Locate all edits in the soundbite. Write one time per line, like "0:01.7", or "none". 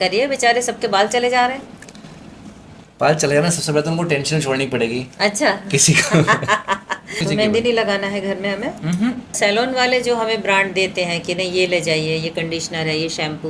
0:07.2
0:09.4